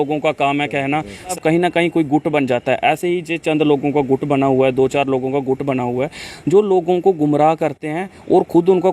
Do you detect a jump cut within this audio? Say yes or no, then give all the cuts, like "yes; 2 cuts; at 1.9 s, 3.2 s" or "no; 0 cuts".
yes; 1 cut; at 1.3 s